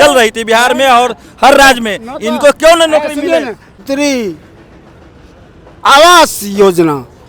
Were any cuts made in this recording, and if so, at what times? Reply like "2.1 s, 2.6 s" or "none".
3.8 s